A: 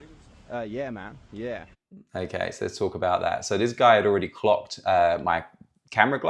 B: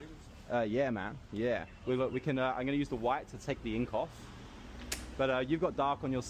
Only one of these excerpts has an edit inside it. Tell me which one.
B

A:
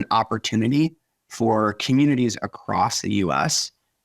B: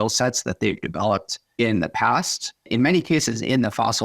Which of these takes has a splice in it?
B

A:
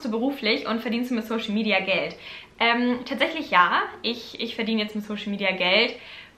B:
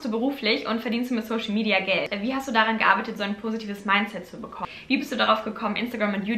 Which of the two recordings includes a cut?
B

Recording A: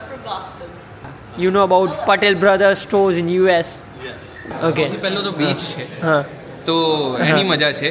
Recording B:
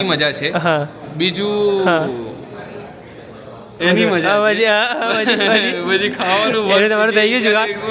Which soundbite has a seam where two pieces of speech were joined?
A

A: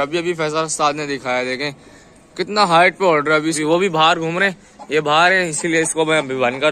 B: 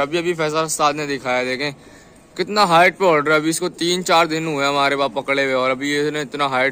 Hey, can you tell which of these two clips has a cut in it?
A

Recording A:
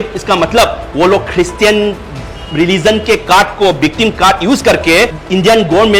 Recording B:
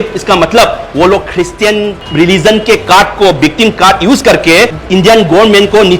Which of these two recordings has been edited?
B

